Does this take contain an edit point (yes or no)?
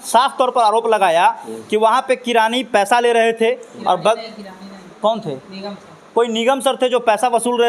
no